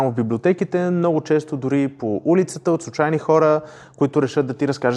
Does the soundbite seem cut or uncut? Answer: uncut